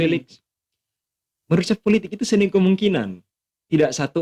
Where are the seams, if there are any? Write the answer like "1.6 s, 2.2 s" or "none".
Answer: none